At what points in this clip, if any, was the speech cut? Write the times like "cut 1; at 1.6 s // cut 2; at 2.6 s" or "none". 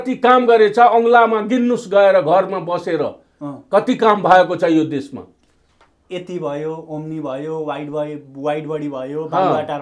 none